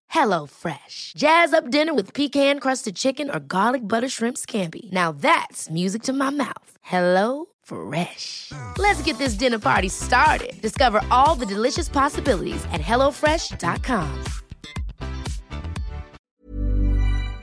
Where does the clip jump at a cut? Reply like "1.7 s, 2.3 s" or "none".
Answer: 16.2 s